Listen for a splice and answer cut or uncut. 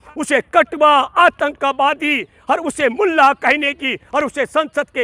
uncut